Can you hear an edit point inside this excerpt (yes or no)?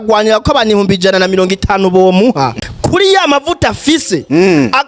yes